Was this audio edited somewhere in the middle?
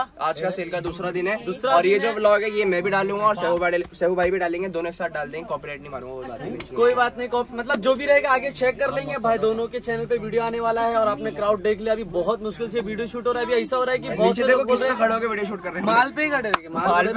no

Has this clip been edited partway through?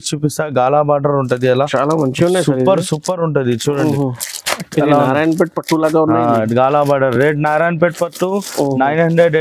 no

